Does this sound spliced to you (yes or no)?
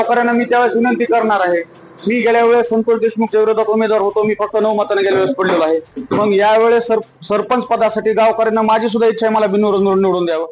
no